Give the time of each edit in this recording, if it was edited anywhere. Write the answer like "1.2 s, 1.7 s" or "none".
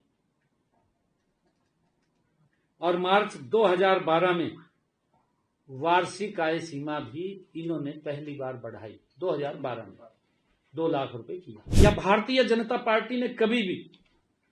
11.6 s